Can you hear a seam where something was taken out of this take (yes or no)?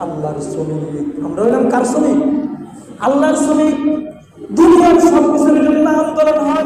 no